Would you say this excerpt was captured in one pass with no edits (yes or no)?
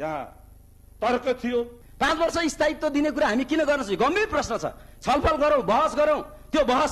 no